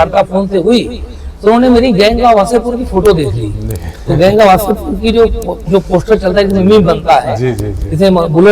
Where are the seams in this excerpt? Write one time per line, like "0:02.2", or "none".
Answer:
none